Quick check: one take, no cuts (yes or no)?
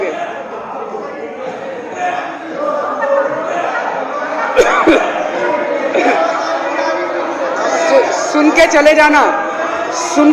yes